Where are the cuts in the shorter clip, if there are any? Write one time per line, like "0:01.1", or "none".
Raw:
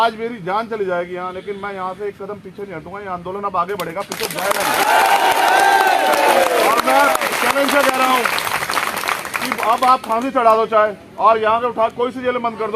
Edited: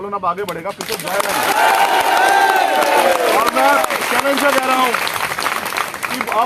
none